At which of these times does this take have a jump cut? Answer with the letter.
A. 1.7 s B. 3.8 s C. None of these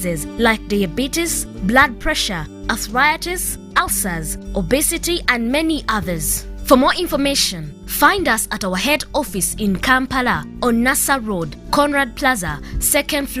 B